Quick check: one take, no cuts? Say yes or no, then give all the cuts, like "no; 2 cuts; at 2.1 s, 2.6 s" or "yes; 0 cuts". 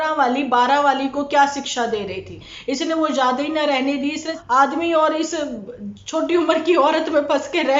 no; 2 cuts; at 2.5 s, 4.3 s